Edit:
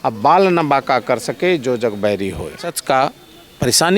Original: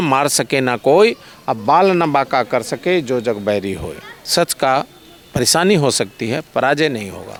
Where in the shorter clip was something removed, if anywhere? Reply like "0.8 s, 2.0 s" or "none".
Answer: 2.9 s